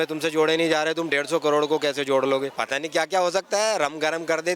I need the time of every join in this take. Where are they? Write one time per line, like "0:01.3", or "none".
0:02.6